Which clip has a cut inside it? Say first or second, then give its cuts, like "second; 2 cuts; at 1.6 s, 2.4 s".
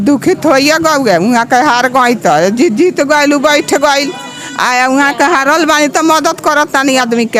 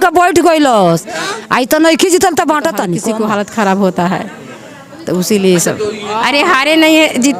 second; 2 cuts; at 2.9 s, 6.0 s